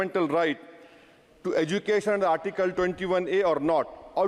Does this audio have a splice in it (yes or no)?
no